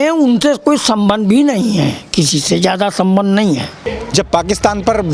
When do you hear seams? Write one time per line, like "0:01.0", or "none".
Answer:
0:04.0